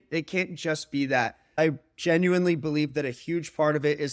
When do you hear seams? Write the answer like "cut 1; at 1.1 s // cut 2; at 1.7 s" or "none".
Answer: cut 1; at 1.6 s